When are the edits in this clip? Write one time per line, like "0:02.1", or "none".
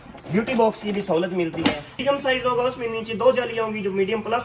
0:02.0